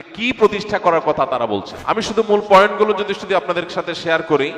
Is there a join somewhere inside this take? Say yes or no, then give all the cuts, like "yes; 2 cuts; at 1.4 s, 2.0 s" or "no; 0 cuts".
yes; 1 cut; at 1.7 s